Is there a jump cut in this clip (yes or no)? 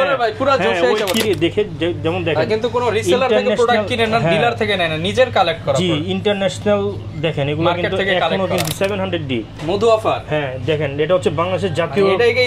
yes